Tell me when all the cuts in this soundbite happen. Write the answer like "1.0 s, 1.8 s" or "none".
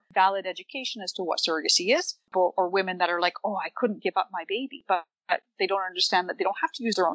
none